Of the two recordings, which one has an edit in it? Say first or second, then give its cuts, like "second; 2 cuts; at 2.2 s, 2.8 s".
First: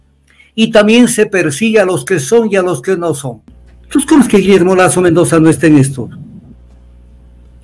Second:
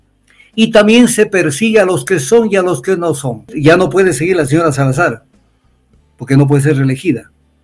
second; 1 cut; at 3.5 s